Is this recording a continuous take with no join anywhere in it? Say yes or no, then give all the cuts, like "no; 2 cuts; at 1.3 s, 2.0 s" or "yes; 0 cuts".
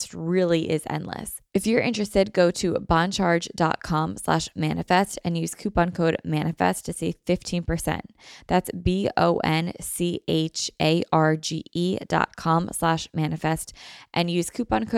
no; 1 cut; at 1.3 s